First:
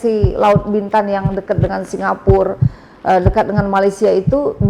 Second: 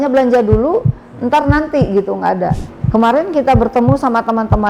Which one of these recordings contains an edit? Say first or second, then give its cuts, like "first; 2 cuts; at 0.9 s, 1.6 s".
second; 1 cut; at 2.7 s